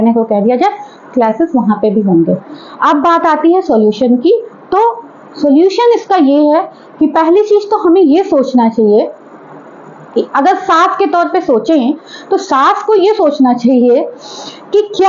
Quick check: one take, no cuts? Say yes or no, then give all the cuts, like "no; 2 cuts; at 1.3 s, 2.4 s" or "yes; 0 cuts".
yes; 0 cuts